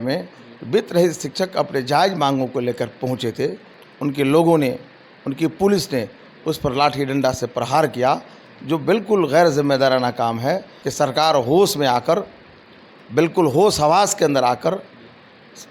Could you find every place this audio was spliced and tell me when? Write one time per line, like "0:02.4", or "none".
0:03.7
0:10.8